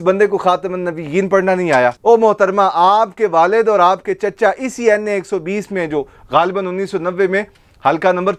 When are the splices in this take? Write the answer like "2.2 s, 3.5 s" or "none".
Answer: 2.0 s